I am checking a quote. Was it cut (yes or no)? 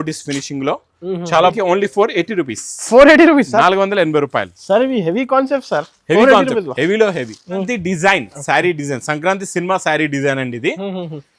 yes